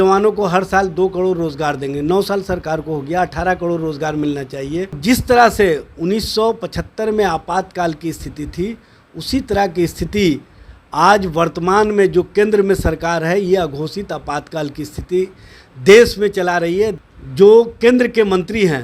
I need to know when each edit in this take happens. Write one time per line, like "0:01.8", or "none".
0:05.0
0:16.9